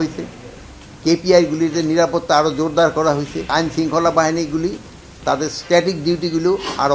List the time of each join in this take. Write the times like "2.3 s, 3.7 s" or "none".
3.5 s